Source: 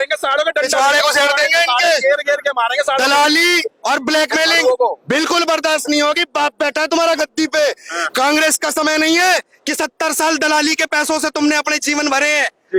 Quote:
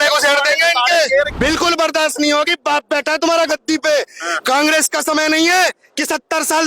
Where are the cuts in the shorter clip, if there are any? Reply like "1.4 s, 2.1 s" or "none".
1.3 s